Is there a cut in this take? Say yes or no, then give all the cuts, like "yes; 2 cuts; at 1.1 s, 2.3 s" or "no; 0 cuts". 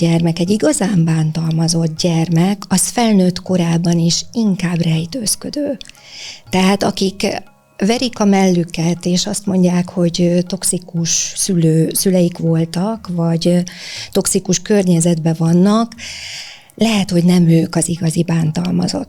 no; 0 cuts